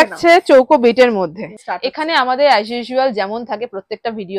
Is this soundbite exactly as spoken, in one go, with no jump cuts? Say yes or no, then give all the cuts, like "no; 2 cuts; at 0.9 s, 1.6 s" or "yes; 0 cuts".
no; 1 cut; at 1.5 s